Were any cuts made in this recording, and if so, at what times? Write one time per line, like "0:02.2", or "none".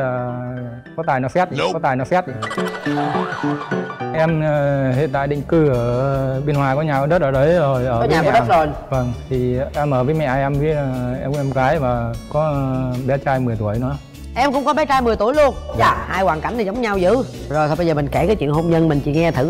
0:04.1